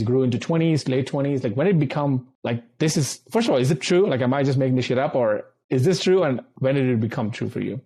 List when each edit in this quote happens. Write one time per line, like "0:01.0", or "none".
none